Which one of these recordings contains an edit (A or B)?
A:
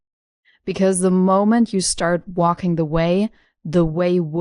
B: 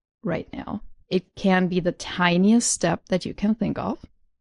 B